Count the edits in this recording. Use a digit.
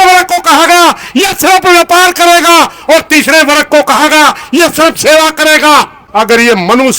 1